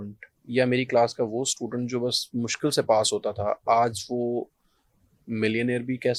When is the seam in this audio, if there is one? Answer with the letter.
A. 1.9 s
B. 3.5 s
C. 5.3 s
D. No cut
D